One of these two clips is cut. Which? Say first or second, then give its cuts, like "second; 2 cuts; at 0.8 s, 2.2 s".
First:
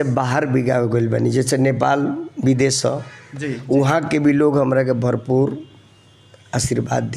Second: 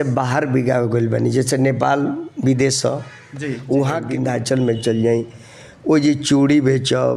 second; 1 cut; at 4.1 s